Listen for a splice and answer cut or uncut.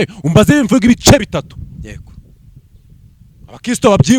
uncut